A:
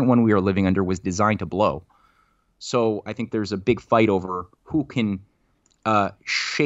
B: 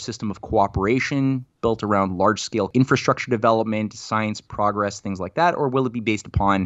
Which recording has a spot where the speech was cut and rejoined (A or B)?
B